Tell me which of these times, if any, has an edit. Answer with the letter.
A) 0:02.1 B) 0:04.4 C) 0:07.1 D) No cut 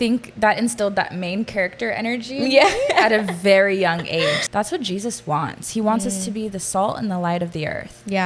B